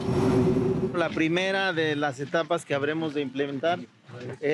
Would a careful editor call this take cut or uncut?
cut